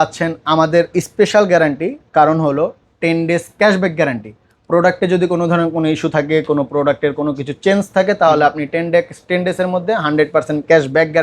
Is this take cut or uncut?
uncut